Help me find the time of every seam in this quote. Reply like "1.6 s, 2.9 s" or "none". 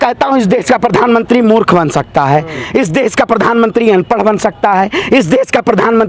none